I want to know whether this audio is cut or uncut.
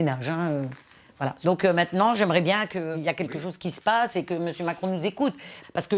uncut